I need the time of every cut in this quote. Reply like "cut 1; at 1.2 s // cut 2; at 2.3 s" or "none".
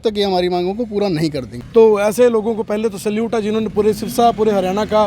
cut 1; at 1.5 s

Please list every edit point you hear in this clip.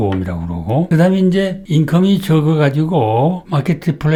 none

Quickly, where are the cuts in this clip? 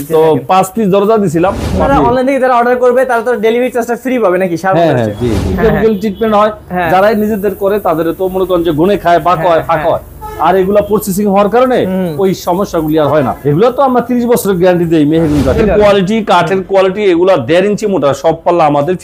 cut 1; at 1.8 s // cut 2; at 5.5 s // cut 3; at 13.4 s // cut 4; at 15.6 s

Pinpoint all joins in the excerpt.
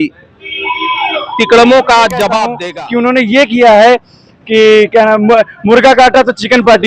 cut 1; at 2.6 s

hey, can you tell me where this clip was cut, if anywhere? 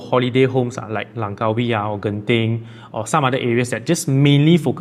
none

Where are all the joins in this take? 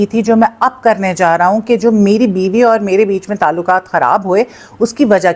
none

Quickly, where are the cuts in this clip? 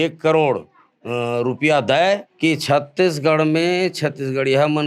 cut 1; at 2.3 s

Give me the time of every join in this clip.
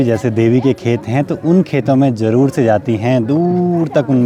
none

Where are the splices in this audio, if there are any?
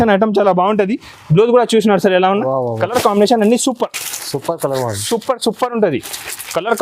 cut 1; at 2.8 s

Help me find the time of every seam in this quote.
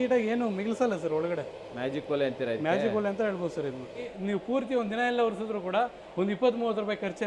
cut 1; at 4.1 s

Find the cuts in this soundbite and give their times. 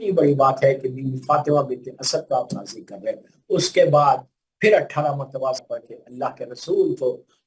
cut 1; at 5.6 s

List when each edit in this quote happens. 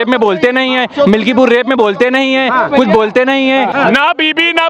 cut 1; at 3.7 s

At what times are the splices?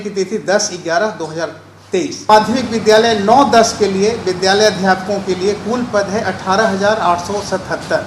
cut 1; at 2.3 s

